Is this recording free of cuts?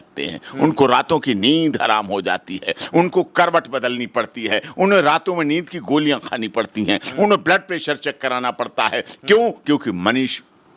yes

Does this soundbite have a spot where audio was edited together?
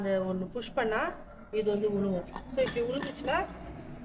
no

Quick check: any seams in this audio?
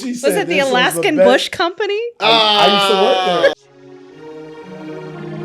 yes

